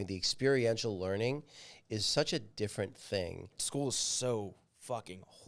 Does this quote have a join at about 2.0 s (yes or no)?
no